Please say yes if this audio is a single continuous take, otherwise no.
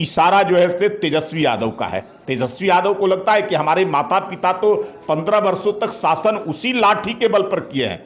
no